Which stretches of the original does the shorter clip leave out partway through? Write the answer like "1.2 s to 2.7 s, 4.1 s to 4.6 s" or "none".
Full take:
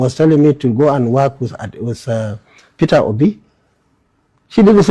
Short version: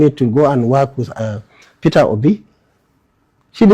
1.7 s to 2.2 s